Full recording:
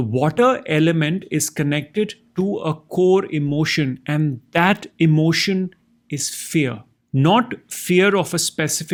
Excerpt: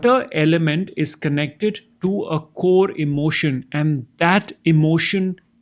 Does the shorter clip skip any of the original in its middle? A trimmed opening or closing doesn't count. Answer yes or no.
no